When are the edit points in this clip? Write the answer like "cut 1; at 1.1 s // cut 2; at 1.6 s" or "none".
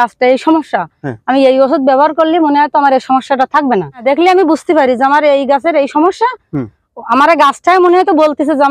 cut 1; at 4.0 s